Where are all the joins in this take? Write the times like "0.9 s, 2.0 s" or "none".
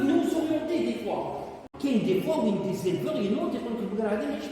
1.6 s